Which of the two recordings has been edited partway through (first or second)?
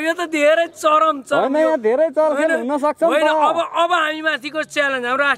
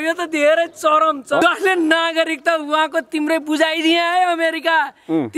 second